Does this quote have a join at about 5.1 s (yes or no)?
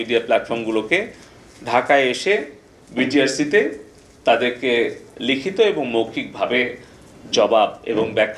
no